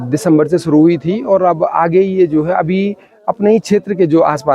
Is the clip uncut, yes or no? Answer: yes